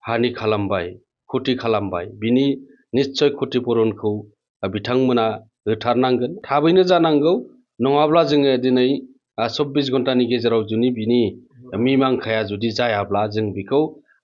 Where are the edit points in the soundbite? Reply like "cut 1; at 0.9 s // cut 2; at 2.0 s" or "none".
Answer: cut 1; at 6.4 s